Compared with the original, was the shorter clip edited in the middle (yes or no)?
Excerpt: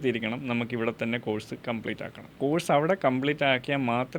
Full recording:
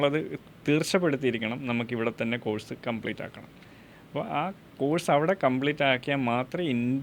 yes